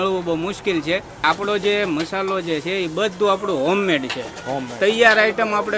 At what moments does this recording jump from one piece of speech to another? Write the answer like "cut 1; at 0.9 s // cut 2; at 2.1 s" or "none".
cut 1; at 1.2 s